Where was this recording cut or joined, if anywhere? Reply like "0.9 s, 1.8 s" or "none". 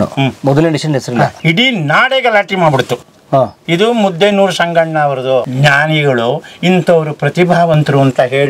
5.5 s